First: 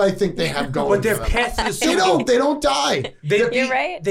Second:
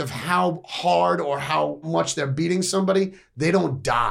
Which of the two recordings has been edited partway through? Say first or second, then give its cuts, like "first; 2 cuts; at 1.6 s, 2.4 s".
second; 1 cut; at 1.9 s